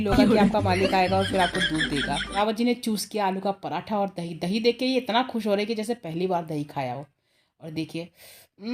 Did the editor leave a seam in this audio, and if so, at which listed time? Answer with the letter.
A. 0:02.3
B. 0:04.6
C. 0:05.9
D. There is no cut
A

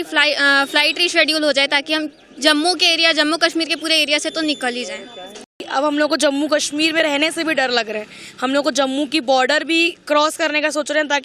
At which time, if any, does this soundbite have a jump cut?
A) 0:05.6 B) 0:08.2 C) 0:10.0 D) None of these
A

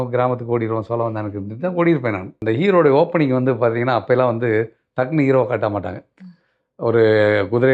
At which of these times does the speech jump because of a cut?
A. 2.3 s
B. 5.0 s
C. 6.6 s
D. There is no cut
A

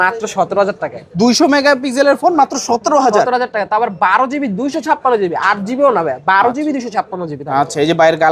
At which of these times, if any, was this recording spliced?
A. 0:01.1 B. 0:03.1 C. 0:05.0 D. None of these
D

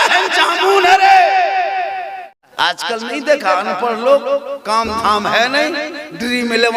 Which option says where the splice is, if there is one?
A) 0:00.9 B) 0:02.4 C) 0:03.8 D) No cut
B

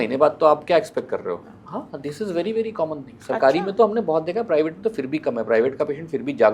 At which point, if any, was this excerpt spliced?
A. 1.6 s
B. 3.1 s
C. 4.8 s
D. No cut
D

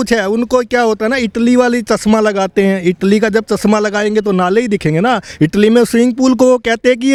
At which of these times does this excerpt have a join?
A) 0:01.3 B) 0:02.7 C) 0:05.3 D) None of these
D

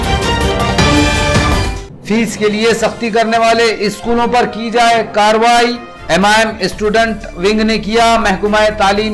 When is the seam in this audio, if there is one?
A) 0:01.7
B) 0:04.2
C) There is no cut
C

